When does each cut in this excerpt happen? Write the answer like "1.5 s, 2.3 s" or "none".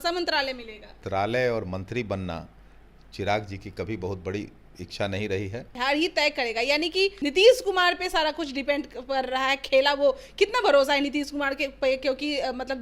1.0 s, 5.7 s, 7.2 s